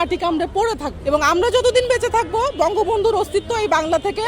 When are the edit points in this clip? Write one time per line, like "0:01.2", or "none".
0:00.9